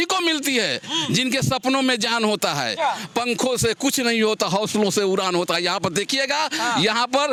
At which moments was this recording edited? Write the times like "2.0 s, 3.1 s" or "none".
none